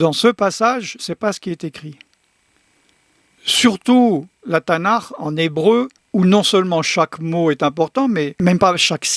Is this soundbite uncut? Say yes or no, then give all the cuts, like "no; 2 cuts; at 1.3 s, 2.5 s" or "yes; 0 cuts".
yes; 0 cuts